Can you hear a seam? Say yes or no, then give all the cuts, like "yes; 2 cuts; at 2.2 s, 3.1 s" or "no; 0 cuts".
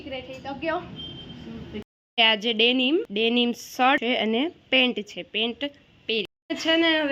yes; 3 cuts; at 1.9 s, 3.1 s, 4.0 s